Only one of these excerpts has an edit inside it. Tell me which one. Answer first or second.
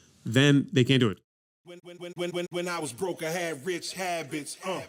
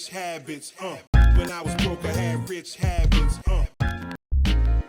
first